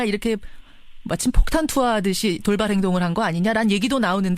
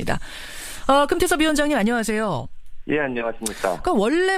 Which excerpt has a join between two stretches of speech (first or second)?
first